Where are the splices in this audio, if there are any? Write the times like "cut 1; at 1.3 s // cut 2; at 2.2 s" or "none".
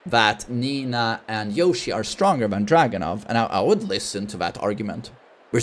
none

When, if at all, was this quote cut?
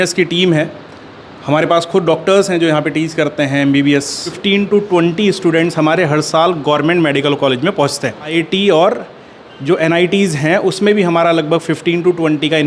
cut 1; at 4.4 s // cut 2; at 8.3 s

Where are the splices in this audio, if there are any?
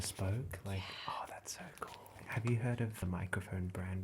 cut 1; at 2.2 s // cut 2; at 3.0 s

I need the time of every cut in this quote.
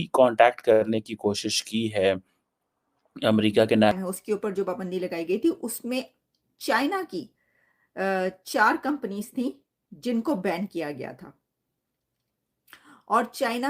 cut 1; at 4.0 s

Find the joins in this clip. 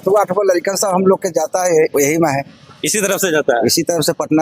none

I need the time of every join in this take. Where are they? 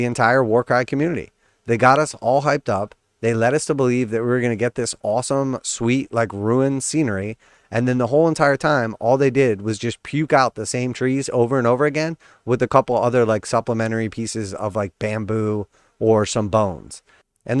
none

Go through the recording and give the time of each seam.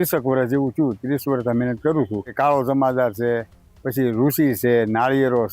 cut 1; at 2.3 s

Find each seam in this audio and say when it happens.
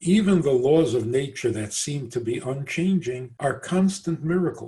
cut 1; at 3.3 s

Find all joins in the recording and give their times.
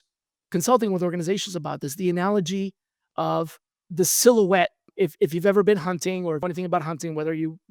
cut 1; at 3.8 s // cut 2; at 4.8 s

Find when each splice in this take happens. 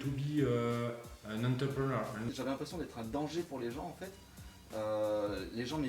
cut 1; at 2.3 s

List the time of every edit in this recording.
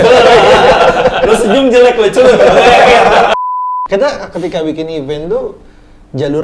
cut 1; at 3.4 s

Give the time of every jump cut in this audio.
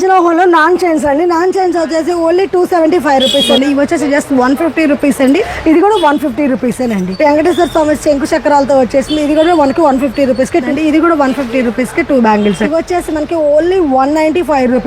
cut 1; at 3.5 s // cut 2; at 5.5 s // cut 3; at 7.1 s // cut 4; at 10.7 s // cut 5; at 12.6 s

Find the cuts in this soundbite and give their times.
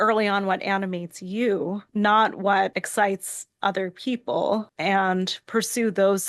cut 1; at 1.8 s // cut 2; at 2.8 s // cut 3; at 4.7 s

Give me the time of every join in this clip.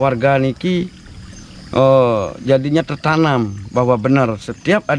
none

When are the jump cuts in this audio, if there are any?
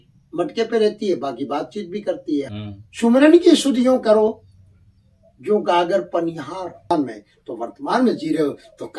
cut 1; at 2.6 s // cut 2; at 6.9 s

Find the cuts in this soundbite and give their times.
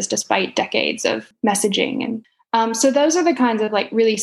cut 1; at 1.3 s // cut 2; at 2.3 s

